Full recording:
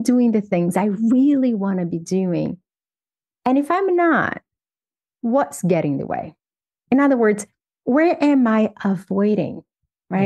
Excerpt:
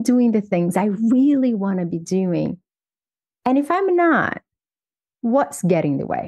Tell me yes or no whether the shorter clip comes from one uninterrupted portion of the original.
yes